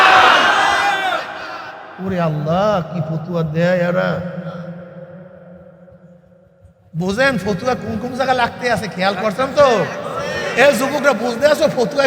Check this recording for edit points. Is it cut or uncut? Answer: uncut